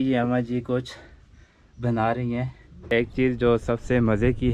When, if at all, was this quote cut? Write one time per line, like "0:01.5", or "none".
0:02.9